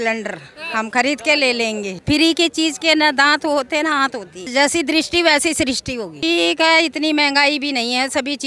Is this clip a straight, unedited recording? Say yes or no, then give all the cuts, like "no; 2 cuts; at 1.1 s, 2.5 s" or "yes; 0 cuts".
no; 3 cuts; at 2.0 s, 4.5 s, 6.1 s